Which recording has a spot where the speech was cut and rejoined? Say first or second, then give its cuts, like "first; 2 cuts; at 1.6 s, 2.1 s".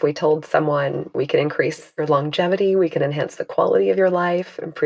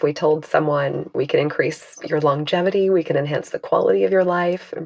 first; 1 cut; at 1.9 s